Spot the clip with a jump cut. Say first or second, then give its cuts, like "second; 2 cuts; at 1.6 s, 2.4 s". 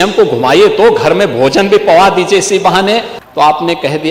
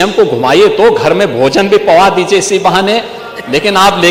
first; 1 cut; at 3.2 s